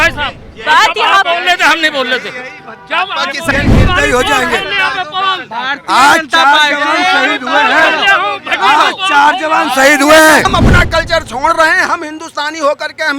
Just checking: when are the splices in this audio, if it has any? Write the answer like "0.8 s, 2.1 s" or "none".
3.5 s, 10.5 s